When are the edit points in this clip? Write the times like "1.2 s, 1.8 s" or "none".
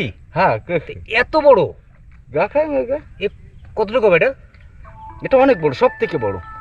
none